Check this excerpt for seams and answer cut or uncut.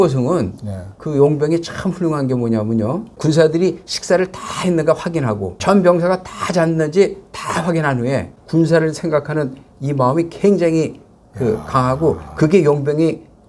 cut